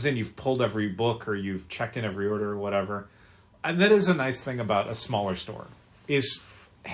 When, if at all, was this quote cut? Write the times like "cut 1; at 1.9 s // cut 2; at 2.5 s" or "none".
none